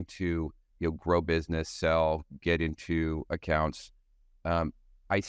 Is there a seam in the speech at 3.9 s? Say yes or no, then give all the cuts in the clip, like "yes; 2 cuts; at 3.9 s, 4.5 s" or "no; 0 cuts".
no; 0 cuts